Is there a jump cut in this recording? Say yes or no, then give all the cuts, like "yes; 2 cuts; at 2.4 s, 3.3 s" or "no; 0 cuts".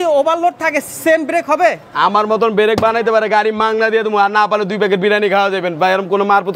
no; 0 cuts